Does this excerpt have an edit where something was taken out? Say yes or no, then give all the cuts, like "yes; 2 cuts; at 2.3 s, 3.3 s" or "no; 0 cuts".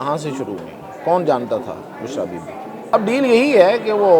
yes; 1 cut; at 2.9 s